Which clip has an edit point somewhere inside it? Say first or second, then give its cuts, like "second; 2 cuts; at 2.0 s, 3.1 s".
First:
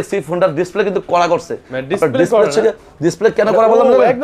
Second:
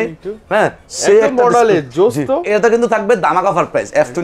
second; 1 cut; at 2.4 s